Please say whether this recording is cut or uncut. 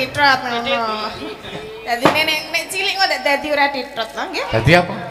uncut